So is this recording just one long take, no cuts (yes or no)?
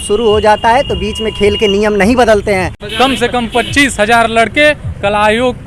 no